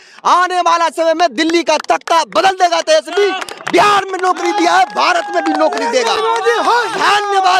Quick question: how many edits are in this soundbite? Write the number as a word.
zero